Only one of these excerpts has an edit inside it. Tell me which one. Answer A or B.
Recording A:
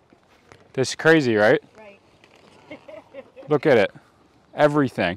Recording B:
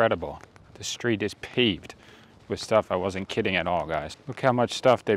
B